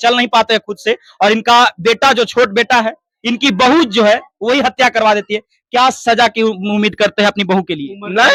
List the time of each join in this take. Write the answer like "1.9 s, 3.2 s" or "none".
none